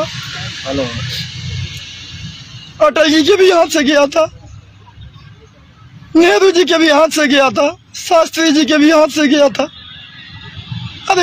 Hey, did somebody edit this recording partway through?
no; 0 cuts

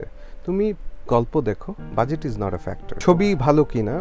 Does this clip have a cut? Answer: yes; 1 cut; at 2.9 s

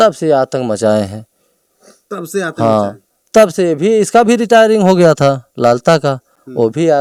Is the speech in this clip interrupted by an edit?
no; 0 cuts

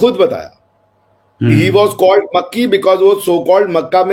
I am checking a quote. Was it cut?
no; 0 cuts

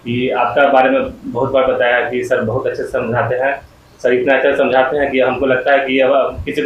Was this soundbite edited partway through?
no; 0 cuts

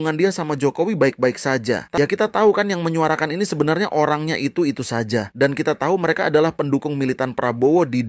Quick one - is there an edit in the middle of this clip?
yes; 1 cut; at 1.9 s

